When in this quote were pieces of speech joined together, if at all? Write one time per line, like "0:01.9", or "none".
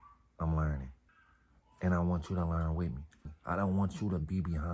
0:03.2